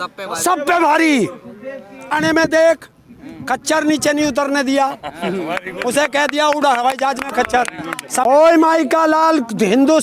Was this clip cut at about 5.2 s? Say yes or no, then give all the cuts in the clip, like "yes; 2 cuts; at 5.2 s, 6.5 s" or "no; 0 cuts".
no; 2 cuts; at 2.2 s, 8.2 s